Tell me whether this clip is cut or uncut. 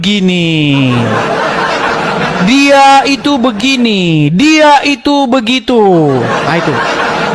uncut